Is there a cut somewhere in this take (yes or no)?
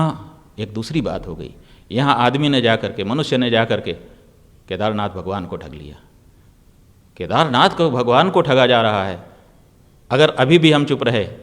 no